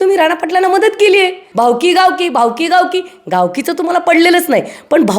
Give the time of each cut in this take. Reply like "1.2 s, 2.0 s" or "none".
1.4 s